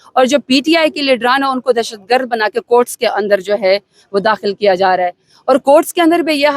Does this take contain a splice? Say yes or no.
no